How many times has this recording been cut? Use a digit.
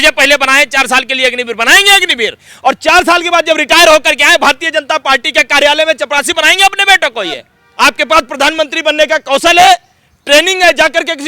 1